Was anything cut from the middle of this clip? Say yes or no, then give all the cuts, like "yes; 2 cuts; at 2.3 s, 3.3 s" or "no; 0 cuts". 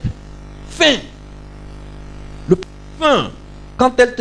no; 0 cuts